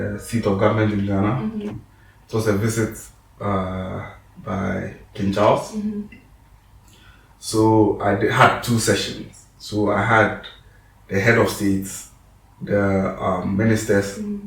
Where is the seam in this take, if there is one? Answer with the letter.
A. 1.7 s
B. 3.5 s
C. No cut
A